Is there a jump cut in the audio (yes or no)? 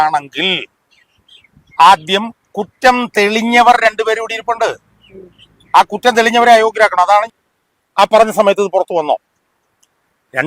yes